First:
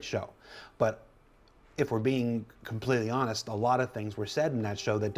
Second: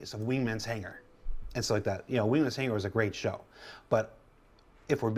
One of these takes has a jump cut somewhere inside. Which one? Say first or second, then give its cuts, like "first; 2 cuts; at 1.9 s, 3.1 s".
first; 1 cut; at 3.3 s